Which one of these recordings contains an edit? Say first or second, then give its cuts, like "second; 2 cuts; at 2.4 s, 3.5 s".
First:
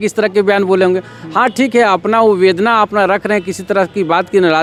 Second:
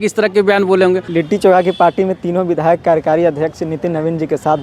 second; 1 cut; at 1.1 s